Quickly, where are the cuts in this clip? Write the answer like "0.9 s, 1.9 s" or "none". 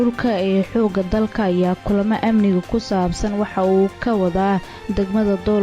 none